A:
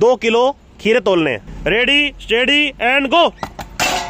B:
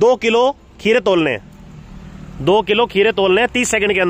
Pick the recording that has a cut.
A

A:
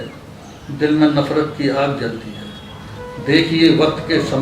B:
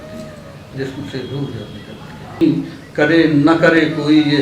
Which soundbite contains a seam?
B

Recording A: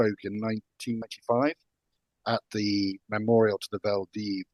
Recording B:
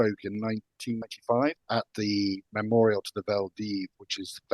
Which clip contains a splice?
B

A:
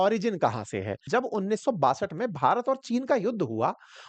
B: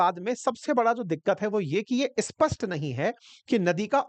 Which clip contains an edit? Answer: A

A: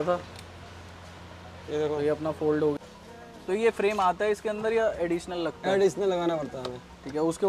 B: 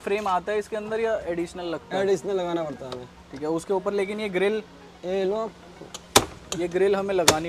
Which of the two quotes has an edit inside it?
A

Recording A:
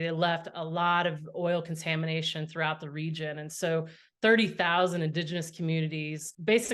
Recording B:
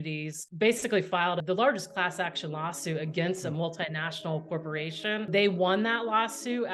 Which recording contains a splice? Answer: B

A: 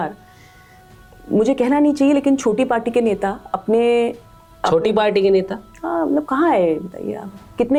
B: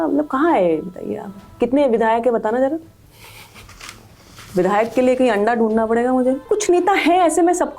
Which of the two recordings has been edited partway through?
B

